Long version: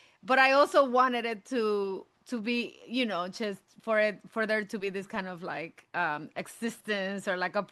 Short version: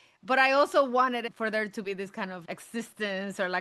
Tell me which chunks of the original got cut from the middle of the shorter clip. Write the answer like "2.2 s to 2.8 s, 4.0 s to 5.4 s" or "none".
1.3 s to 4.3 s, 5.4 s to 6.3 s